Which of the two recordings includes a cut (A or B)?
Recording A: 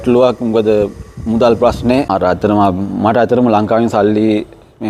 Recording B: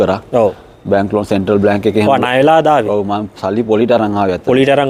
A